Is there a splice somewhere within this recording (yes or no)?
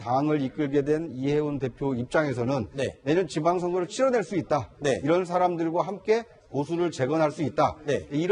yes